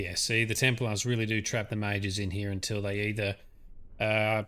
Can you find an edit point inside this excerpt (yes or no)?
no